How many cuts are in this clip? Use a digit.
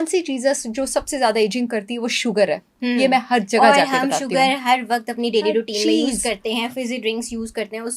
0